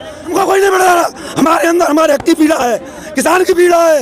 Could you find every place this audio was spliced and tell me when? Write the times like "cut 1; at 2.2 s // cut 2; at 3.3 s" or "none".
none